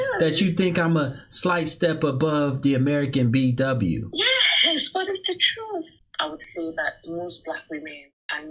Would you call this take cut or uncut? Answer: cut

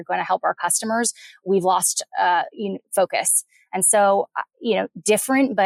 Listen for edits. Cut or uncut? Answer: uncut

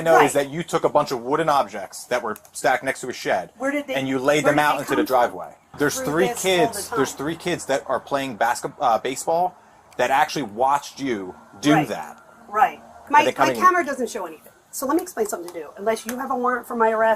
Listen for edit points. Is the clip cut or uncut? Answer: cut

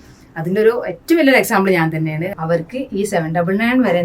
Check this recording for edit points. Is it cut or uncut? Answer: cut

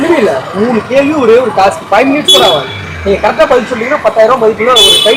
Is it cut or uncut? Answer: uncut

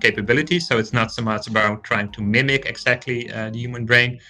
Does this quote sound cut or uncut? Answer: uncut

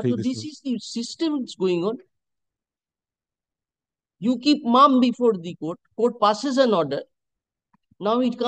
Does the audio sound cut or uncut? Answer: uncut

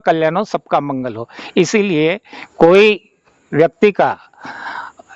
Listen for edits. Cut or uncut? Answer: uncut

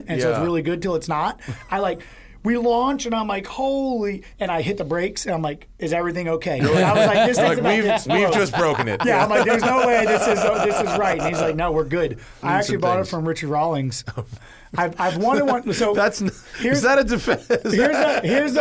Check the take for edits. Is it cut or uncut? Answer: cut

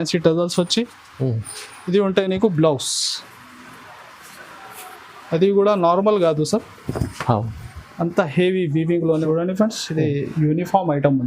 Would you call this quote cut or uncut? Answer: cut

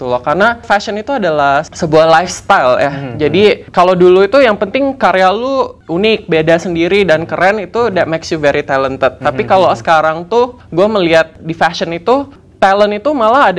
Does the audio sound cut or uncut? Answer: uncut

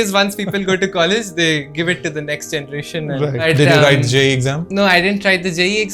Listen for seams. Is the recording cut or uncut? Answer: cut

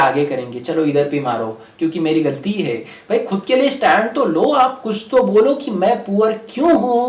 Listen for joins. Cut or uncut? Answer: uncut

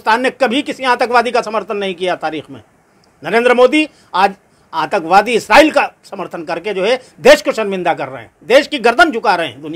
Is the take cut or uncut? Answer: uncut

